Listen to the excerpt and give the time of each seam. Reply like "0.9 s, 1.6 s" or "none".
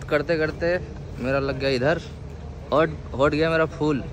none

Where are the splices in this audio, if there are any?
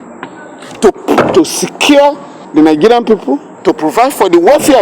2.3 s, 3.5 s

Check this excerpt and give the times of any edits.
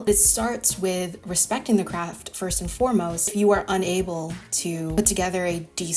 none

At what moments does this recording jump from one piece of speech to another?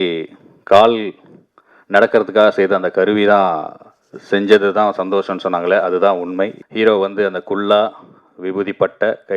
6.6 s

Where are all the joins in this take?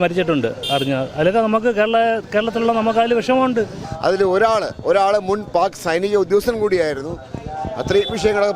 3.9 s

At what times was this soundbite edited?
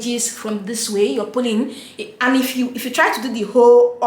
none

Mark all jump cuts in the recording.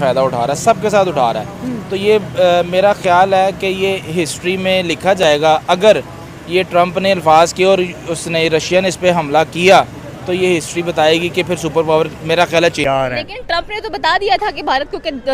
12.8 s

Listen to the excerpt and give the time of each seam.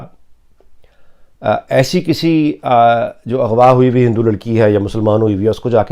none

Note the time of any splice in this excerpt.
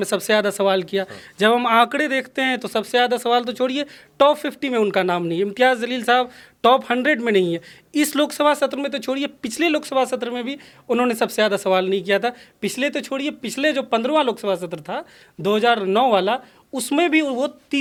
none

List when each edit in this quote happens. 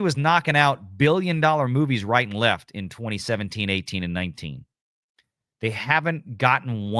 none

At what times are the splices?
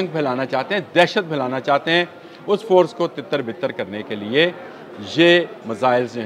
none

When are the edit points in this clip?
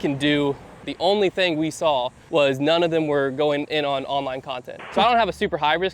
0.8 s, 2.2 s, 4.9 s

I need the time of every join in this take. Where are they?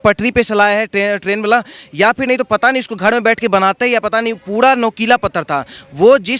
none

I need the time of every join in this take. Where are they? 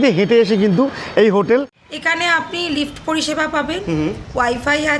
1.8 s

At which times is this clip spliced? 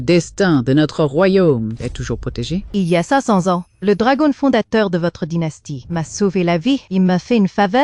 2.7 s

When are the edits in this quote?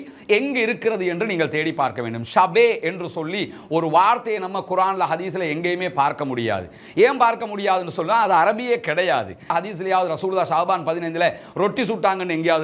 9.5 s

